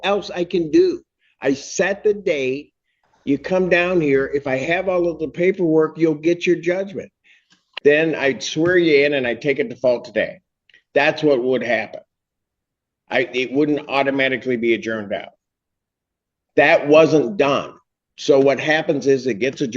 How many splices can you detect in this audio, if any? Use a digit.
1